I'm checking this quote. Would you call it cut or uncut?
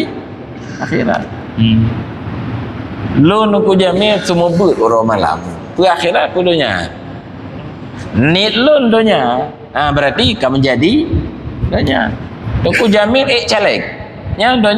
uncut